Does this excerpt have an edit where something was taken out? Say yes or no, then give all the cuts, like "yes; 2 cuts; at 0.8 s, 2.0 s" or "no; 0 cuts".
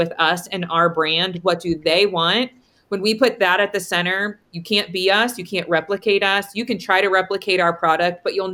no; 0 cuts